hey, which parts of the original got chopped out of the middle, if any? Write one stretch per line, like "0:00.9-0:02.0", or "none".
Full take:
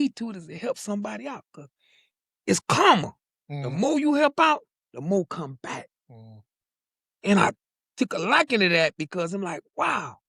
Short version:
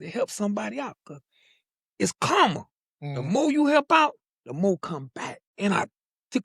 0:05.9-0:07.1